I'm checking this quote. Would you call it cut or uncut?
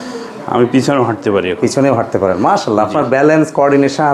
uncut